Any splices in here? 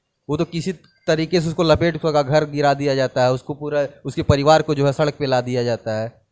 no; 0 cuts

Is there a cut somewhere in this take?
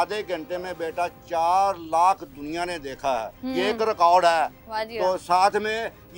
no; 0 cuts

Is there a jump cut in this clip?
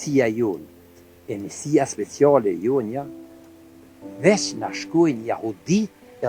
no; 0 cuts

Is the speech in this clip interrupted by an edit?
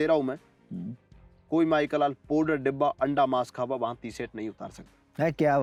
no; 0 cuts

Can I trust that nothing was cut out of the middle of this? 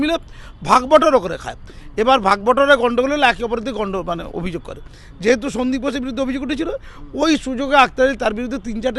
yes; 0 cuts

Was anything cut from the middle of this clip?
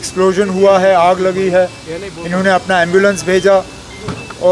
no; 0 cuts

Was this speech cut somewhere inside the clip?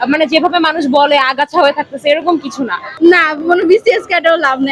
yes; 1 cut; at 2.8 s

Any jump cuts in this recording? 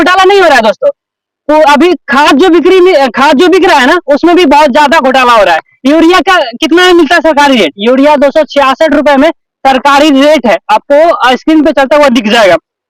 no; 0 cuts

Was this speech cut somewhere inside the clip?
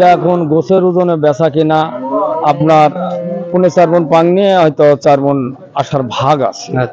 no; 0 cuts

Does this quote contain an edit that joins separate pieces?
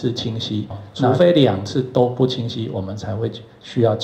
yes; 1 cut; at 1.1 s

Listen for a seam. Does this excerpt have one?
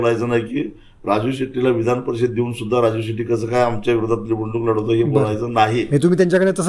no; 0 cuts

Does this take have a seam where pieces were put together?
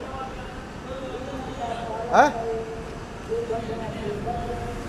no; 0 cuts

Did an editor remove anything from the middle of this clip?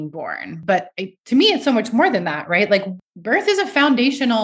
yes; 1 cut; at 2.9 s

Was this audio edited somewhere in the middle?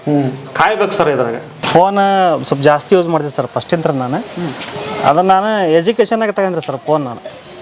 yes; 1 cut; at 1.6 s

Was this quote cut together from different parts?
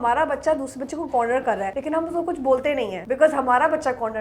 yes; 2 cuts; at 1.7 s, 3.0 s

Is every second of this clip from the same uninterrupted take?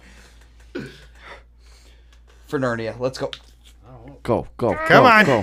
yes; 0 cuts

